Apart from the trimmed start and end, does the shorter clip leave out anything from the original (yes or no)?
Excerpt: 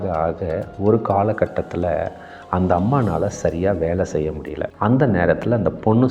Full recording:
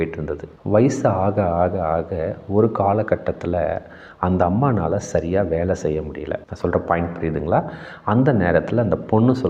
yes